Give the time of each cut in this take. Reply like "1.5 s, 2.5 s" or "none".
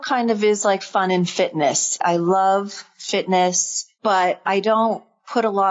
2.0 s

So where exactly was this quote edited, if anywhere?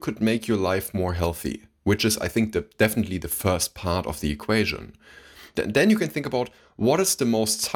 5.4 s

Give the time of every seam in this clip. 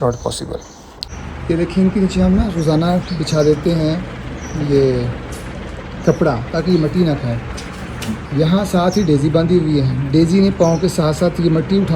1.0 s

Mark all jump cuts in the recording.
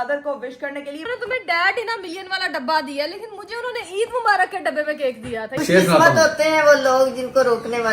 1.0 s, 5.6 s

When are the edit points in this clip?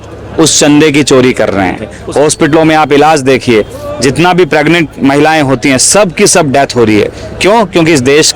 1.9 s

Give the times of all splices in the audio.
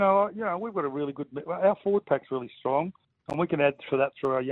none

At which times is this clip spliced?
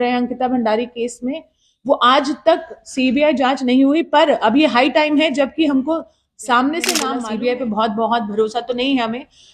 7.1 s

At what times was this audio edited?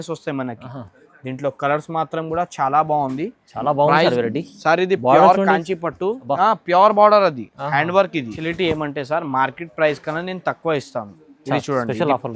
8.4 s

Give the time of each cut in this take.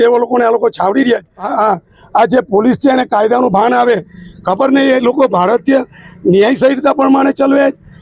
1.5 s

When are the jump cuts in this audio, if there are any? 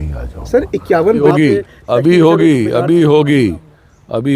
1.2 s

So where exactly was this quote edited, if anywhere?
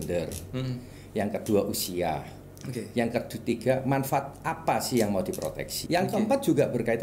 5.8 s

